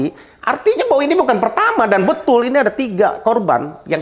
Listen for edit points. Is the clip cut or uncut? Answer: uncut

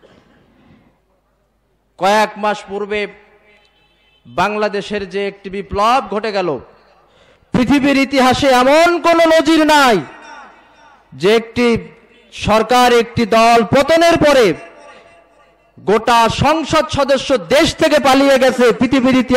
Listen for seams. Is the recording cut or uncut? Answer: uncut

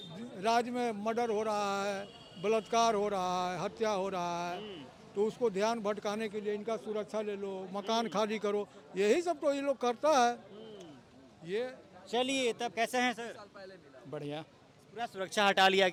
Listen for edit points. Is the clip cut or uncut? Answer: uncut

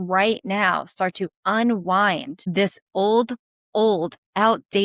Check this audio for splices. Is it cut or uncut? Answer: cut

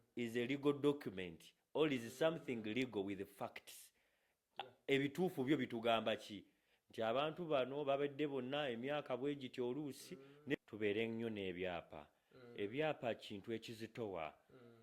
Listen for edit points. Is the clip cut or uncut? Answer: cut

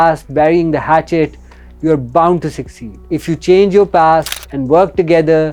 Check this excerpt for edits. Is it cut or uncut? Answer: uncut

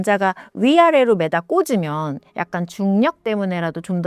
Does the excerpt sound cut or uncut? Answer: uncut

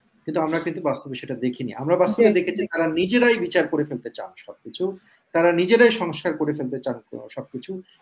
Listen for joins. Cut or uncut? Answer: uncut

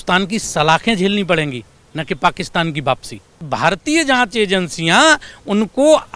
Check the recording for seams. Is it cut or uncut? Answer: cut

